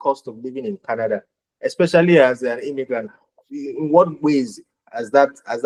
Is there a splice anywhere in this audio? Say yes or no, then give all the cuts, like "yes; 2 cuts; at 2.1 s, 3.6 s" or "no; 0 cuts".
no; 0 cuts